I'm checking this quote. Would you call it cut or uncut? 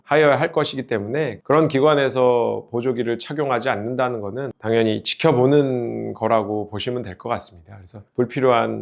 uncut